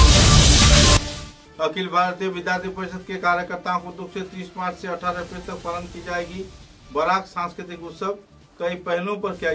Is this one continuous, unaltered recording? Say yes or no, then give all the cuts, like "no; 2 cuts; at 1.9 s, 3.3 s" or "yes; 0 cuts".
yes; 0 cuts